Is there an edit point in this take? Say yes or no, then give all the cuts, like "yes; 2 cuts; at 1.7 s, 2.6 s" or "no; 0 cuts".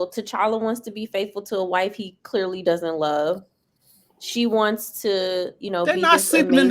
no; 0 cuts